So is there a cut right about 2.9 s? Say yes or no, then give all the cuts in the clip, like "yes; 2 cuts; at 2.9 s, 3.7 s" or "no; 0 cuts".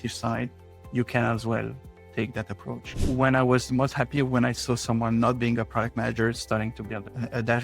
yes; 1 cut; at 2.9 s